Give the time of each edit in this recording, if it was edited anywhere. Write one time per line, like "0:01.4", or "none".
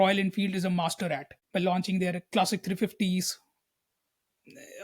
0:01.3